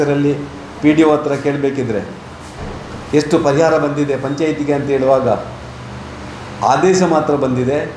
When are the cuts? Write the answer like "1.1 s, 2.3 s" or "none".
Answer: none